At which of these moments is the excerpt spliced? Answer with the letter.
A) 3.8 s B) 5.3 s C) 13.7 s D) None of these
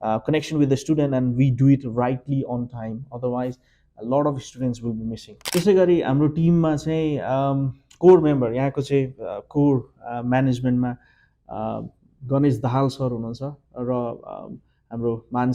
B